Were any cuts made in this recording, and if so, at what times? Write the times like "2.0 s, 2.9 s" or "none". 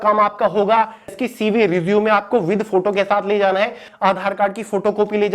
1.1 s, 3.9 s

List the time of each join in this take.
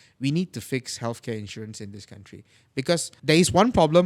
3.1 s

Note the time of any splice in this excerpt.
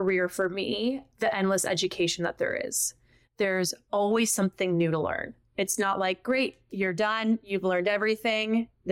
1.1 s

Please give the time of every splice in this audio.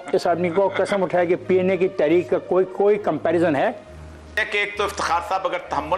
4.4 s

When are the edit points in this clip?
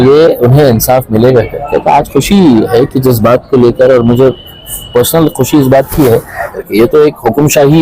6.5 s

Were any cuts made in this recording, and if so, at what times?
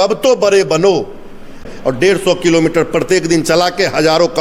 1.6 s

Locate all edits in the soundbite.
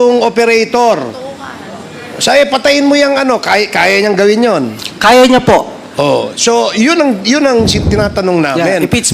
none

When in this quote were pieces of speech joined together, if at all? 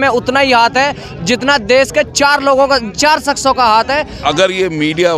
4.1 s

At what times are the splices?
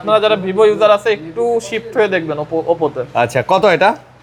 none

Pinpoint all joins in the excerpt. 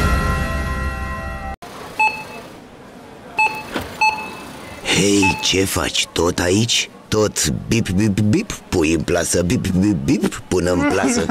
1.7 s

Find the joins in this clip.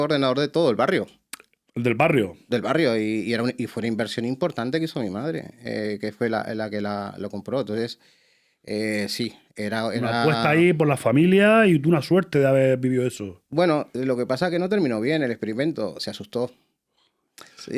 none

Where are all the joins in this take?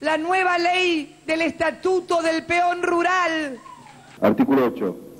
4.1 s

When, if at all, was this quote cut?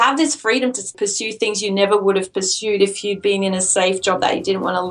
0.9 s

